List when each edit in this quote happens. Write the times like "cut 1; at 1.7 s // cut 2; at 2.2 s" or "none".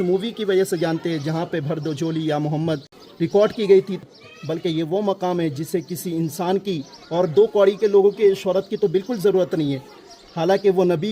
cut 1; at 3.0 s // cut 2; at 4.0 s